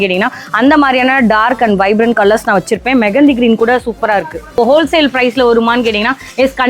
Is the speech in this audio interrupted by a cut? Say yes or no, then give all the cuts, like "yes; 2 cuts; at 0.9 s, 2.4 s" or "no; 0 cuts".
yes; 1 cut; at 4.6 s